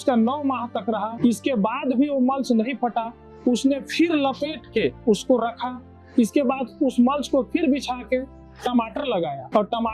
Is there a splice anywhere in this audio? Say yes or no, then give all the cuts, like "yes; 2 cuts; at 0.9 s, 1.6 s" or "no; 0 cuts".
no; 0 cuts